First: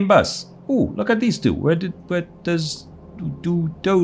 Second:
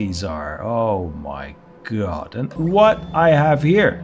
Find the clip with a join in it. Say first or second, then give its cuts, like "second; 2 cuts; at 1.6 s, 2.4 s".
second; 1 cut; at 2.6 s